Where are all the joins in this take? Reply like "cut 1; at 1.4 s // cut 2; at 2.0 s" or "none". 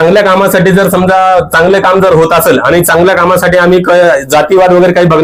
none